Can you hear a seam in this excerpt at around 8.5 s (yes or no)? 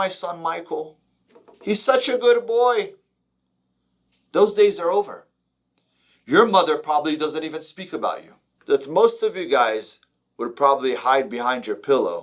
yes